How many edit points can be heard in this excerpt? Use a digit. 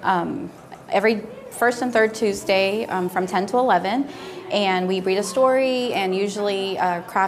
0